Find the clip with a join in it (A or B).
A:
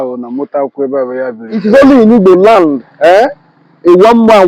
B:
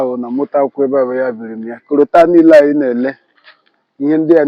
A